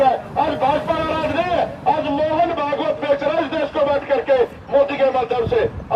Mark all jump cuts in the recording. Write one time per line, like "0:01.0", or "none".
none